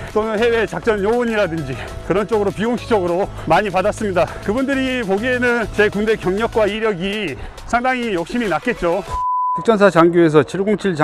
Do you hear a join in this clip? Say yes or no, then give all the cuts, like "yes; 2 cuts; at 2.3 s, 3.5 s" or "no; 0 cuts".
yes; 1 cut; at 9.2 s